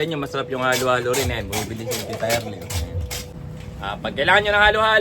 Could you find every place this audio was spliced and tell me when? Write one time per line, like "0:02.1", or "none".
0:03.3

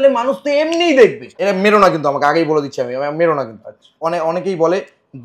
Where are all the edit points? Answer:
0:01.4
0:04.0

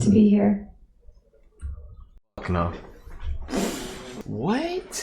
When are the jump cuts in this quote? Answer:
0:04.1

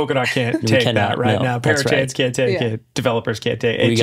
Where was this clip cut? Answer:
none

